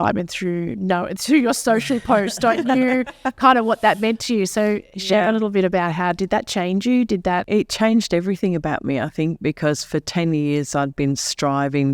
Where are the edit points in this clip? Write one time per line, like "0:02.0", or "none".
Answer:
0:07.4